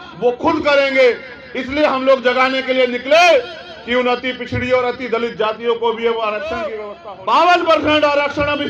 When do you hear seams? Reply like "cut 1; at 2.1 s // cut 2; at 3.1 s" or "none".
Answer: cut 1; at 6.9 s